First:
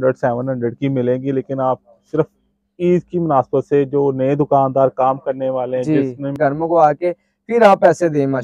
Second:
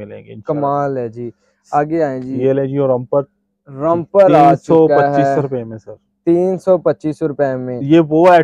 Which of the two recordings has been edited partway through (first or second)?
first